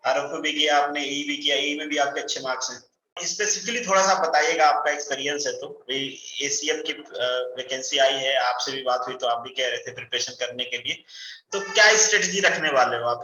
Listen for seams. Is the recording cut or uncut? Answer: cut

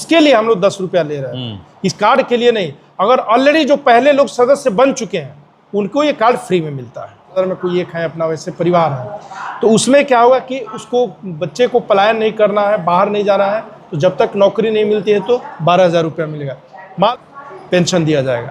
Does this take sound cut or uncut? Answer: cut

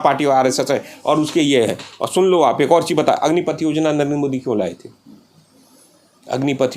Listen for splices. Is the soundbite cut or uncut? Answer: uncut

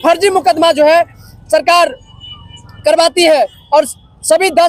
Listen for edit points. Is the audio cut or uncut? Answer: uncut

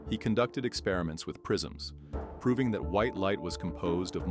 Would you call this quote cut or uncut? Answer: uncut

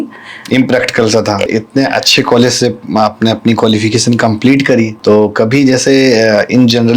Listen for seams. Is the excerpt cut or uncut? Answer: cut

